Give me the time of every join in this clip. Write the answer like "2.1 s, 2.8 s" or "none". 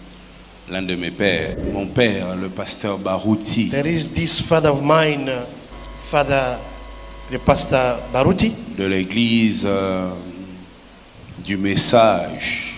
1.6 s